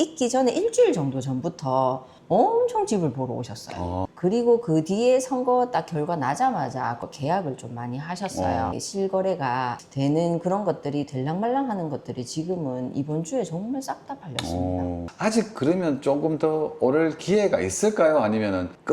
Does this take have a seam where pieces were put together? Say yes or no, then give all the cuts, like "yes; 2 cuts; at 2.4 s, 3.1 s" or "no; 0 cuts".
yes; 3 cuts; at 4.1 s, 8.8 s, 15.1 s